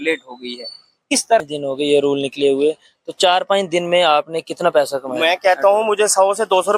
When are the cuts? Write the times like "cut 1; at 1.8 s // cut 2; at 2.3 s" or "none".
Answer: cut 1; at 1.4 s